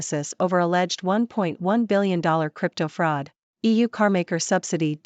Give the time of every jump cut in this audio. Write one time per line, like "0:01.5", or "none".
0:03.4